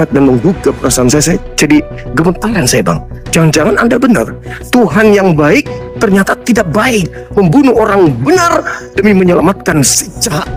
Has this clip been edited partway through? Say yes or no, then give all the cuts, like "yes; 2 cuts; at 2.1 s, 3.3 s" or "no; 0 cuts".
no; 0 cuts